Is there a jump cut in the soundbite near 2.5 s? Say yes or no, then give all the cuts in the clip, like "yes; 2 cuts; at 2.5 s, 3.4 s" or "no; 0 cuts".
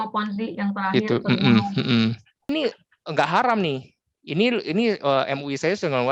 yes; 1 cut; at 2.5 s